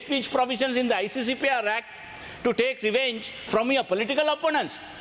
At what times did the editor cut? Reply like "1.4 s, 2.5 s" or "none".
none